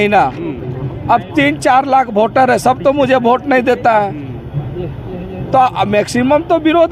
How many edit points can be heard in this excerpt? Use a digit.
0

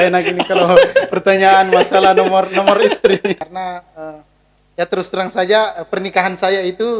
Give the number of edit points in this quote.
1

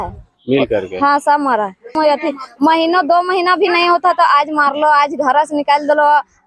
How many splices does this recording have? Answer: 1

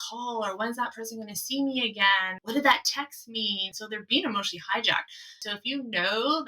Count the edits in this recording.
3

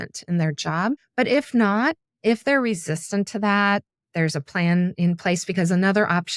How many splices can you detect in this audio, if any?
2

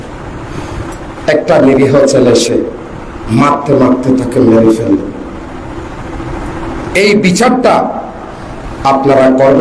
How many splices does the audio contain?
0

